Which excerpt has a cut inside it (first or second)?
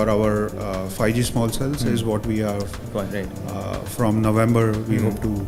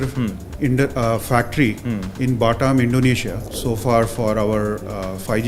second